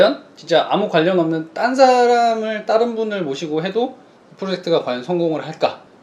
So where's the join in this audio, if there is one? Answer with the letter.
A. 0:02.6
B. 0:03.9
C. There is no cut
C